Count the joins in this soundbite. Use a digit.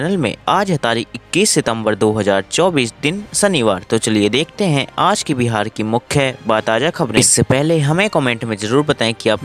1